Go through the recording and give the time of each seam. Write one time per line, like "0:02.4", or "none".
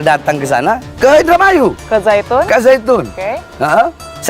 0:00.9